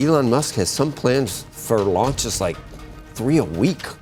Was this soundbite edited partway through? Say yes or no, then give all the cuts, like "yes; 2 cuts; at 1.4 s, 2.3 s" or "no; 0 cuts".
no; 0 cuts